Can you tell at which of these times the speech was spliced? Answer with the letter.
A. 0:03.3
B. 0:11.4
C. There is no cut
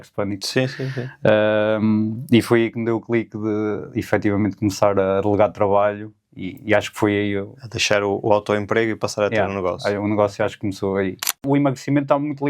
B